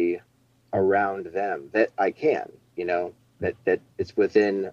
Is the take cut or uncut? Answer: uncut